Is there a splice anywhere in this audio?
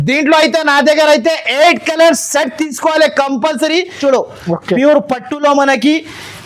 yes; 1 cut; at 4.0 s

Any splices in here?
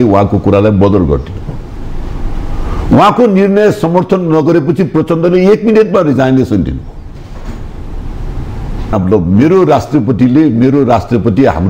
yes; 1 cut; at 8.9 s

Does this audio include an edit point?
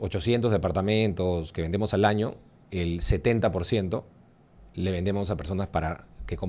no; 0 cuts

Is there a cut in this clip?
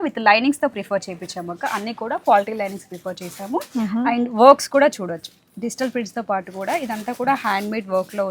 no; 0 cuts

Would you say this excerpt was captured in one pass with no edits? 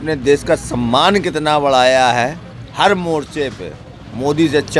yes; 0 cuts

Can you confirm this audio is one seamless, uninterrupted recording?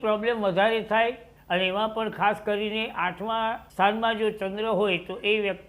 no; 1 cut; at 1.3 s

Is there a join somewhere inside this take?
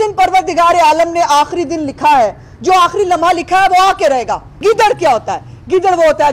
yes; 1 cut; at 4.6 s

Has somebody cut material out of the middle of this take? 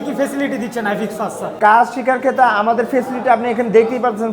yes; 1 cut; at 1.5 s

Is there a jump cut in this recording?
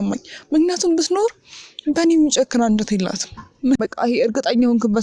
yes; 1 cut; at 3.8 s

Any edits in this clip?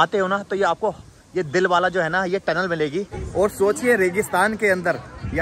yes; 1 cut; at 3.2 s

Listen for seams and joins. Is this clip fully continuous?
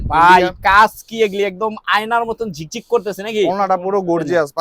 yes; 0 cuts

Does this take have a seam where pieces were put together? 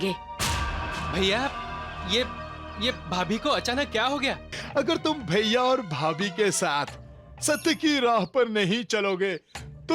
yes; 1 cut; at 4.5 s

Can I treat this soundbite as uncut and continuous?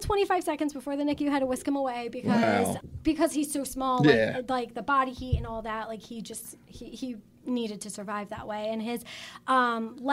no; 1 cut; at 2.8 s

